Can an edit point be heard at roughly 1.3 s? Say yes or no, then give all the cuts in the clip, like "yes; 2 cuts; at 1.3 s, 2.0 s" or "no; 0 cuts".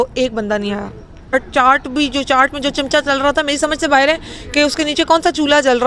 yes; 1 cut; at 1.3 s